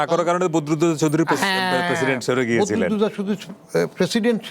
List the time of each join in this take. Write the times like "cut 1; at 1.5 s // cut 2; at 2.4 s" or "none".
none